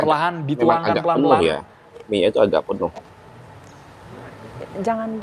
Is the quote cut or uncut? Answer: uncut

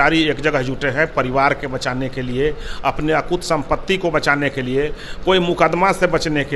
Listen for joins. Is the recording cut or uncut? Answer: uncut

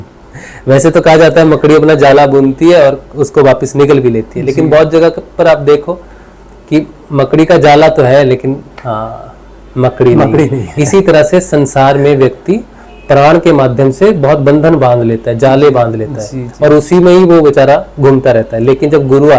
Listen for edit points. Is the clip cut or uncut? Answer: uncut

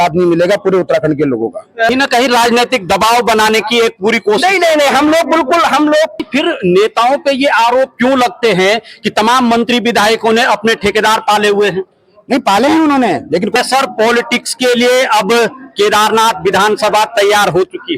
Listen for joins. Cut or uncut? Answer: cut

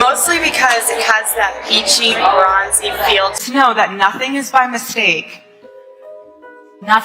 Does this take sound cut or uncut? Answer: cut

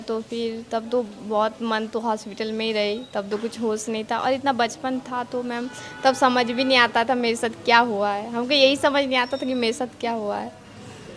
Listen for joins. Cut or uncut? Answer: uncut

